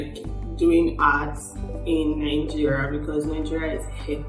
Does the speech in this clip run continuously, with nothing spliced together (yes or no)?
yes